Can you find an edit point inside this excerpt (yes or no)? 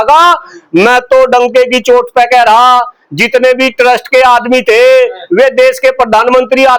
no